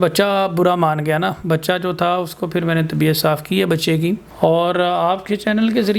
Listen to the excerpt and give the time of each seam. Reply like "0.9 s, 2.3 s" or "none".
4.3 s